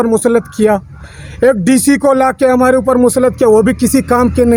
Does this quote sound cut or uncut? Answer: uncut